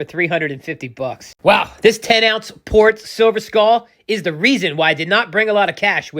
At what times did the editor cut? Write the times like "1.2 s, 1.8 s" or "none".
1.3 s